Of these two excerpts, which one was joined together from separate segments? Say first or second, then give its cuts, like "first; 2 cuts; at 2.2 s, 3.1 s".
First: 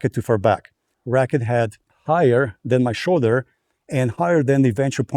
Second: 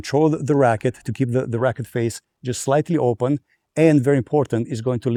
first; 2 cuts; at 0.9 s, 1.9 s